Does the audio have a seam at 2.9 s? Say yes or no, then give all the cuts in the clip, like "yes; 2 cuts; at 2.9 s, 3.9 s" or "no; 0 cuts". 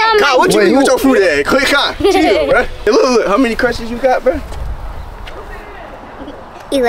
yes; 1 cut; at 2.9 s